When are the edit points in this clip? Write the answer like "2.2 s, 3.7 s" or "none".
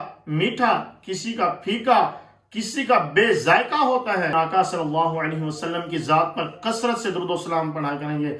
4.3 s